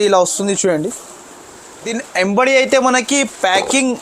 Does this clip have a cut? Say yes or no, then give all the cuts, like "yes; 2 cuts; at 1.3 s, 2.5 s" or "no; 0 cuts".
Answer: yes; 1 cut; at 1.9 s